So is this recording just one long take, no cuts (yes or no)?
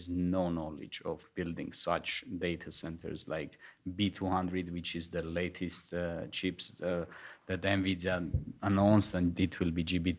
yes